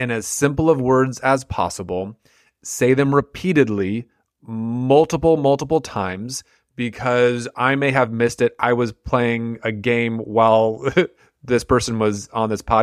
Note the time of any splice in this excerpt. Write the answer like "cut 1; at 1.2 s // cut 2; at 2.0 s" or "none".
none